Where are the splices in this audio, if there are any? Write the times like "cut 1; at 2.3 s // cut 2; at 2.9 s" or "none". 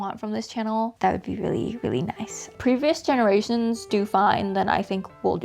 cut 1; at 0.9 s // cut 2; at 2.6 s